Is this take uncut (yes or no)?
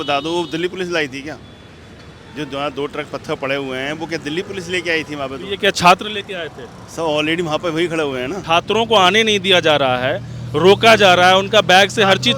no